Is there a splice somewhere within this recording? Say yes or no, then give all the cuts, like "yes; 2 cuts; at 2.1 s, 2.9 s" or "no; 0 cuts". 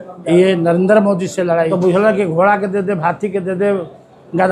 yes; 1 cut; at 1.7 s